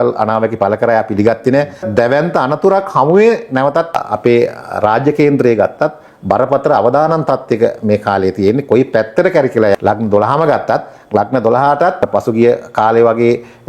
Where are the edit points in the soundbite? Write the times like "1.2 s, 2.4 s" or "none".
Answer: 1.9 s, 4.0 s, 9.7 s, 12.0 s